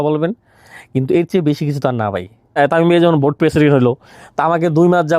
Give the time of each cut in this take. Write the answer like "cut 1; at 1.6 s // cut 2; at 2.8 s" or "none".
cut 1; at 2.5 s